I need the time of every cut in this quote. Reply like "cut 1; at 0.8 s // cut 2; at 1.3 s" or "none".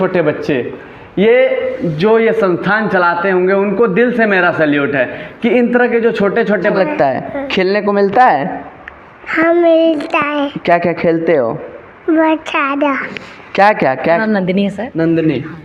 cut 1; at 6.7 s // cut 2; at 14.2 s